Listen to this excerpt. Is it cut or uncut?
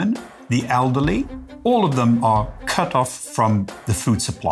cut